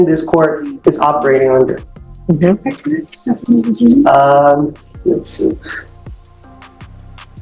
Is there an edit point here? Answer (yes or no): no